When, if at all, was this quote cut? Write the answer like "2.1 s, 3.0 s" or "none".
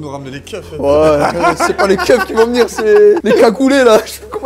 3.2 s